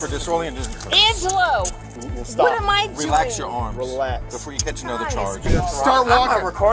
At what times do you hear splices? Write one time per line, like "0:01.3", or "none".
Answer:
0:05.5